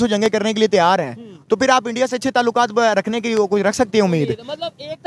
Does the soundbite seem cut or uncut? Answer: uncut